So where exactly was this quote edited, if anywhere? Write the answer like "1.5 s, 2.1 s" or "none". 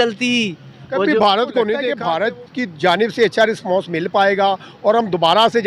1.9 s

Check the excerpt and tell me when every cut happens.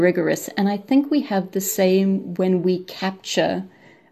none

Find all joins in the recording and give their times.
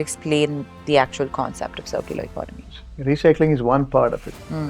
2.8 s

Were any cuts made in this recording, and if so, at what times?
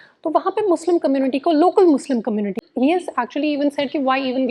2.6 s

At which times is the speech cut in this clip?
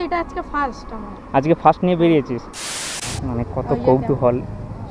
2.9 s

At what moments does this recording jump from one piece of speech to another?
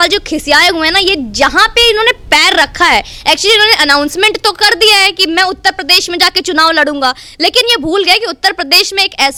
none

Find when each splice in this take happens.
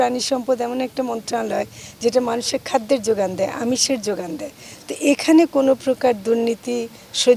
none

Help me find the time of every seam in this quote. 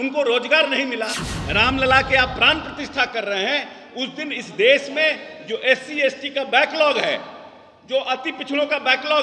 1.2 s

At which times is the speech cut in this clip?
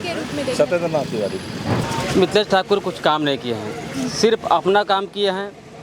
2.2 s

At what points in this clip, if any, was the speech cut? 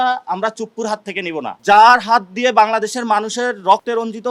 1.6 s

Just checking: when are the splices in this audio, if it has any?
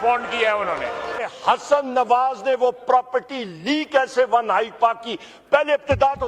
1.3 s

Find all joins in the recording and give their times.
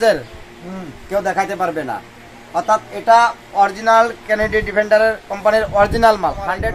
none

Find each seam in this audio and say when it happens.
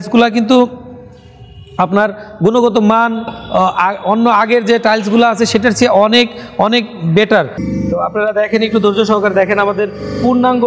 7.6 s

